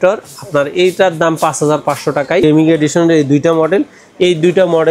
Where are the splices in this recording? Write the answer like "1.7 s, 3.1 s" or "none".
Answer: 2.4 s